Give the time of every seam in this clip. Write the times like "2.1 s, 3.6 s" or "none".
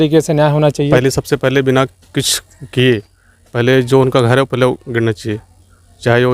0.9 s